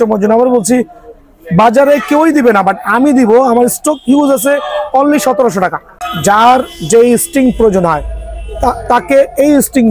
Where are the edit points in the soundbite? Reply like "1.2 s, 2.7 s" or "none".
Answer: 5.9 s